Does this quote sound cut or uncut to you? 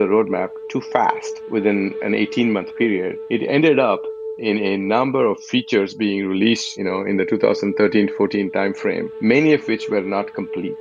uncut